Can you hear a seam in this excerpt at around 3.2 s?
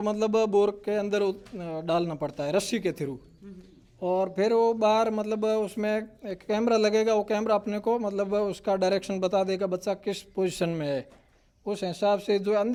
no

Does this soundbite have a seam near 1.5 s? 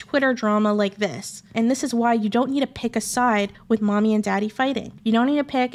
yes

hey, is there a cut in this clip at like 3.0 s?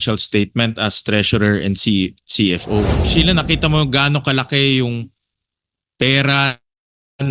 yes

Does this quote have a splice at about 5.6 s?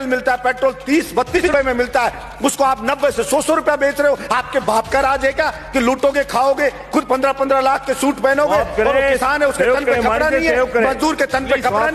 no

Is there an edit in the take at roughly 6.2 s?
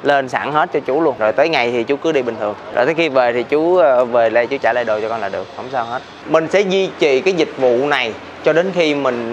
yes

